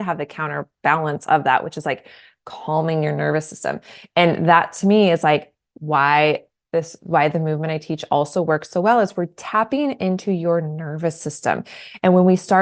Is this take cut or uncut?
uncut